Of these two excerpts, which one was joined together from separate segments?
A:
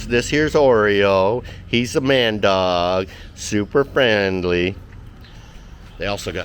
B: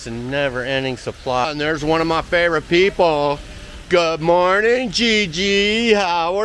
B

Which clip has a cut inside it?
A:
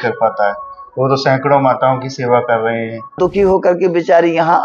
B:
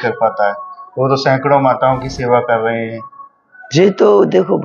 A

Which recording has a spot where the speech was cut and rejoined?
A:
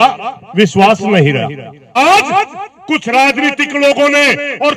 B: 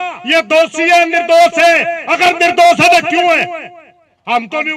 A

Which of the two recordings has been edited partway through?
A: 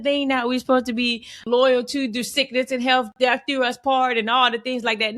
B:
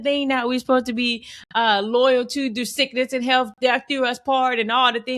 A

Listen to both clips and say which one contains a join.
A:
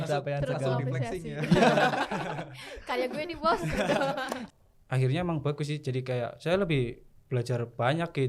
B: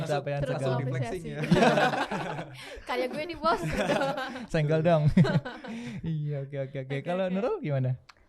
A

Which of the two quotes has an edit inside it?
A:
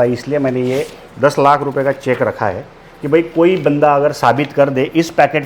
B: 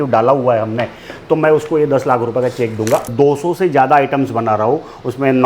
B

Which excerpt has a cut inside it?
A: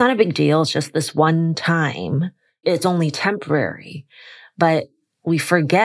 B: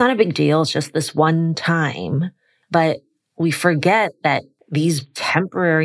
B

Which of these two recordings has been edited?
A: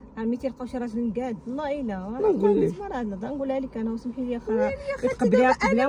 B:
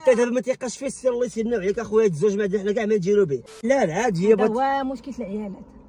B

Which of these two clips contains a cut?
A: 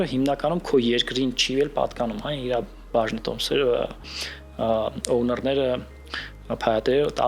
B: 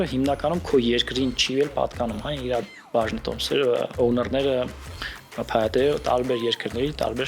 B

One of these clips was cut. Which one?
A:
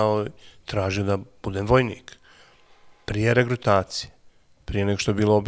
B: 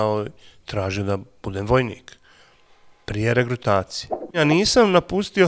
B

